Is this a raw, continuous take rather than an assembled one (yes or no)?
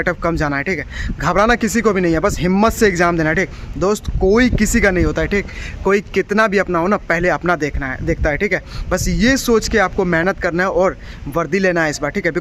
yes